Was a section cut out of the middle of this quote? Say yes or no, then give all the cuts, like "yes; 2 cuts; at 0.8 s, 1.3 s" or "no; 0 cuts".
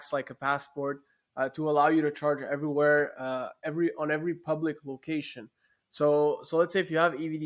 no; 0 cuts